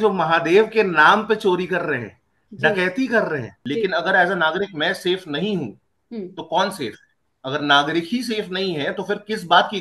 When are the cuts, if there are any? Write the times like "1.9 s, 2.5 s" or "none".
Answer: 3.5 s

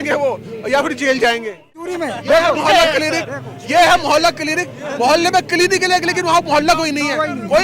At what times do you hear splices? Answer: 1.9 s

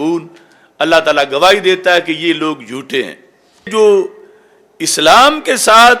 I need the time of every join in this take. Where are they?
3.7 s

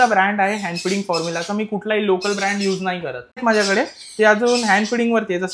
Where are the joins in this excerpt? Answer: 3.4 s

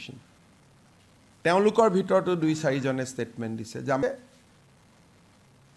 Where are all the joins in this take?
4.0 s

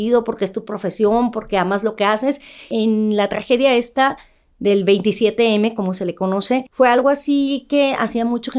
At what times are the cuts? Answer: 2.6 s, 6.7 s

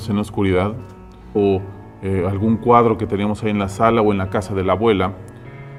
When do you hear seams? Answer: none

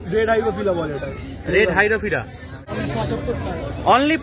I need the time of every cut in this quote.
2.6 s

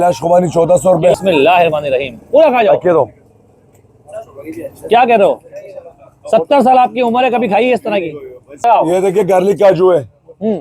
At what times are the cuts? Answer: 1.1 s, 8.5 s

